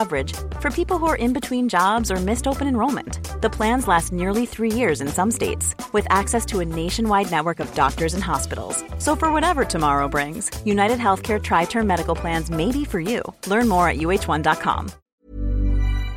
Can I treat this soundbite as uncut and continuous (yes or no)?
no